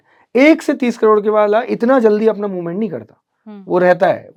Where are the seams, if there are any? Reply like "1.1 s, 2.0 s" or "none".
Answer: none